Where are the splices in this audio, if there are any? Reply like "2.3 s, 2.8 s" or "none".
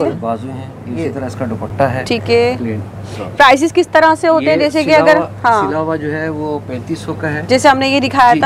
none